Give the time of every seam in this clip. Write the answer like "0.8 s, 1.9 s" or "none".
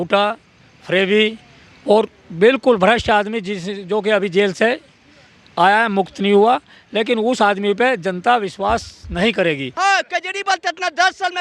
9.7 s